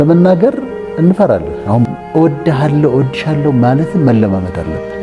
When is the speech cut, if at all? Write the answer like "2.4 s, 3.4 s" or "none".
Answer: 1.9 s